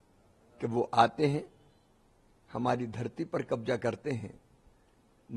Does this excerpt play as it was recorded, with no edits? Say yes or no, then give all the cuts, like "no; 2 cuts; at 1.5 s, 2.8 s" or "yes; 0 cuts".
yes; 0 cuts